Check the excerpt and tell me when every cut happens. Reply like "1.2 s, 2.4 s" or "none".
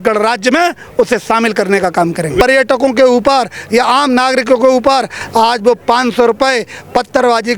2.4 s